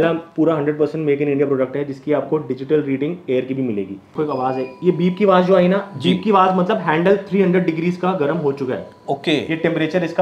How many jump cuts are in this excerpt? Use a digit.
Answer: 1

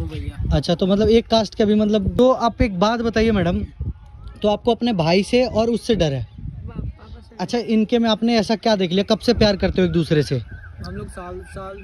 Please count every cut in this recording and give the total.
0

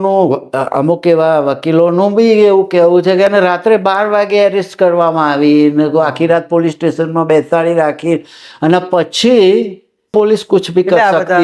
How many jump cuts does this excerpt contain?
1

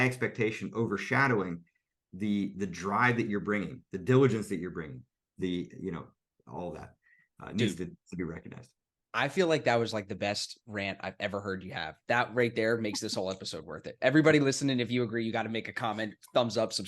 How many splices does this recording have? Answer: 0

